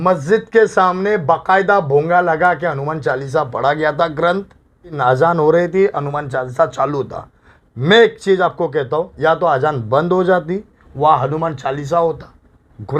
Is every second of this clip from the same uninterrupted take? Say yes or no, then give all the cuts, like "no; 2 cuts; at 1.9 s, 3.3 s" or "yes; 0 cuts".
no; 1 cut; at 5.0 s